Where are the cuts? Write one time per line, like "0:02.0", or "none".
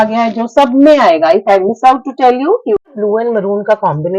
0:02.8